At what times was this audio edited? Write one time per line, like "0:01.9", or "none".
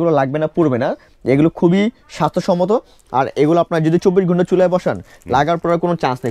none

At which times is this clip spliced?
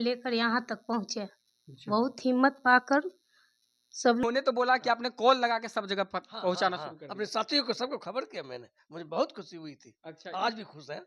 0:04.2

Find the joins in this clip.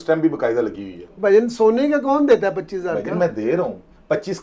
0:01.0

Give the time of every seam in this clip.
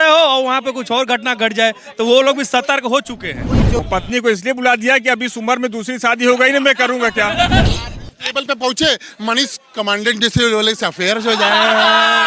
0:03.8
0:07.7

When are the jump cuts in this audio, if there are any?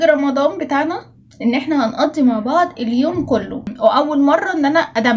0:03.7

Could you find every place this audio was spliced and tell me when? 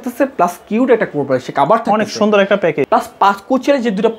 0:02.8

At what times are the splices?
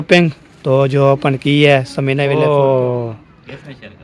0:02.4

